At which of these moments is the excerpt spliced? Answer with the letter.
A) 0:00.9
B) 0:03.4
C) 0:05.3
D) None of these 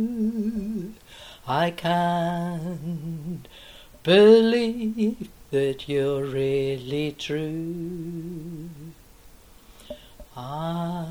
D